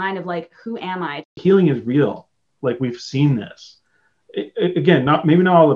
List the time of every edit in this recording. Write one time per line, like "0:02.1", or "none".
0:01.3

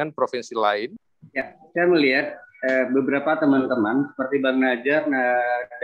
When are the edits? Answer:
0:01.0

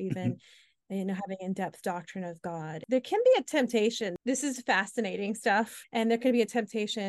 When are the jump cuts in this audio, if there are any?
0:02.8
0:04.1
0:05.8

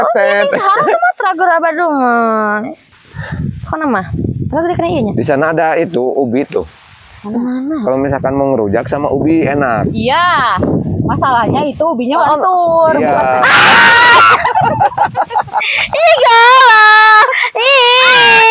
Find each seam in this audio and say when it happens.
0:02.8

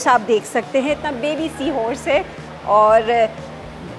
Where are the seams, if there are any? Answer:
none

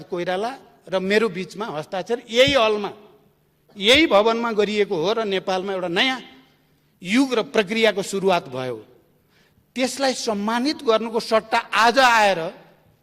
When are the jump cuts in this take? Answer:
none

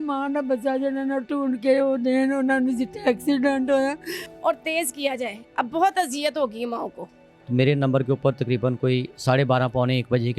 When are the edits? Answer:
0:04.2
0:07.2

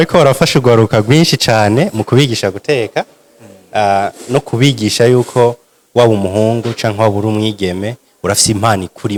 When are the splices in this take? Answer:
none

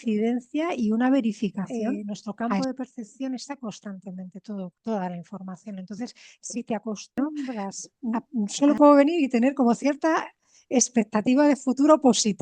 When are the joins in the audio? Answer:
0:02.4
0:07.8

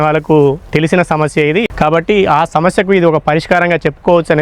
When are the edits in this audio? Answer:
0:01.6

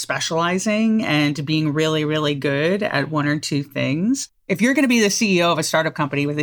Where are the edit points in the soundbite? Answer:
0:04.4

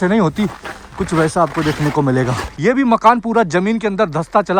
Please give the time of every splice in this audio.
0:02.4

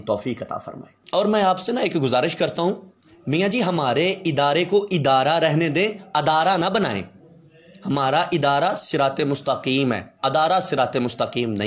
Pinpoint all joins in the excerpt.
none

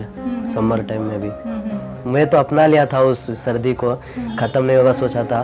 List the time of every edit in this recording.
0:02.0

